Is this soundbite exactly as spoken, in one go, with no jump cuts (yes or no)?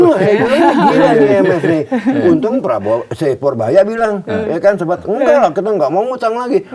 yes